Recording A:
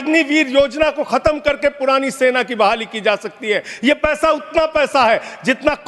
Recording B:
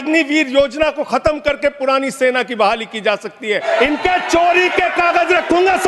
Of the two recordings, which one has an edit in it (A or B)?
B